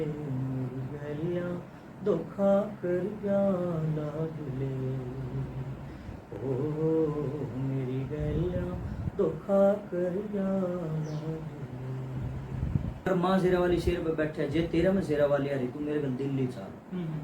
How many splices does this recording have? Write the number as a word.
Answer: one